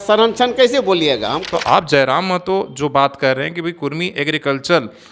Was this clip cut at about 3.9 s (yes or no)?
no